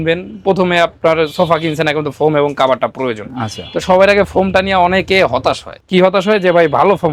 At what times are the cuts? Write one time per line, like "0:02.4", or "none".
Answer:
none